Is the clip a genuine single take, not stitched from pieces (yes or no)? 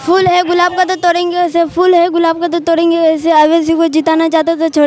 yes